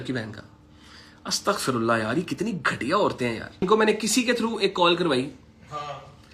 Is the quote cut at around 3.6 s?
yes; 1 cut; at 3.6 s

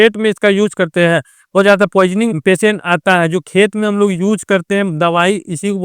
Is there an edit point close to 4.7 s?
no; 2 cuts; at 1.6 s, 2.4 s

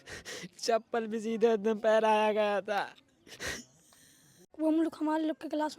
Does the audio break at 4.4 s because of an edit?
yes; 1 cut; at 4.4 s

